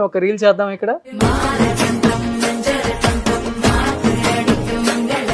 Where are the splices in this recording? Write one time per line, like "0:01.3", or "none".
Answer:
0:01.1